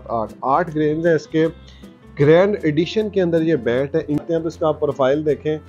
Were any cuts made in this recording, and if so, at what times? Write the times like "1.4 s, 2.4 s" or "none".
4.2 s